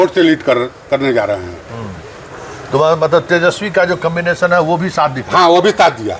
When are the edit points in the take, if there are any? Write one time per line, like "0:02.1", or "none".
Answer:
none